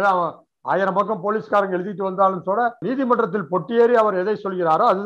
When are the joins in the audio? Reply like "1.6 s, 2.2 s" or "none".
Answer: 2.8 s